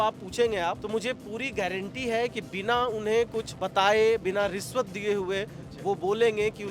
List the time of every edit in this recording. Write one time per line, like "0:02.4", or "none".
0:00.8
0:03.6